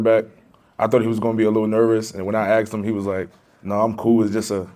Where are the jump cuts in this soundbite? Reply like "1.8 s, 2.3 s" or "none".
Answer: none